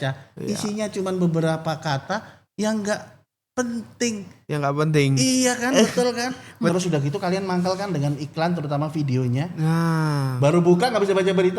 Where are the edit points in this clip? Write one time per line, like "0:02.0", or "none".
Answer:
0:06.7